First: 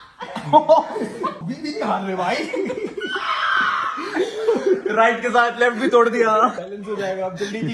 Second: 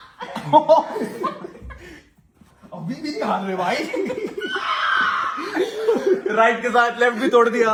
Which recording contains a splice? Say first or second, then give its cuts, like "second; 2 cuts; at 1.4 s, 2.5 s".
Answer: first; 2 cuts; at 1.4 s, 6.6 s